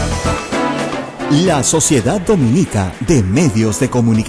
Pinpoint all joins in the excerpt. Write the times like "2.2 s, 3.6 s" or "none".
1.1 s